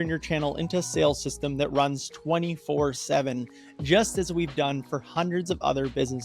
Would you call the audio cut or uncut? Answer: cut